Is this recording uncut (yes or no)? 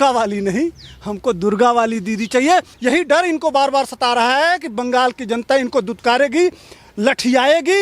no